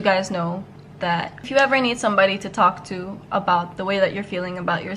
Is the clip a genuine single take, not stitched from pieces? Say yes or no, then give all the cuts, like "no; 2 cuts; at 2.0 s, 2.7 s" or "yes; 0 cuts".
no; 1 cut; at 1.1 s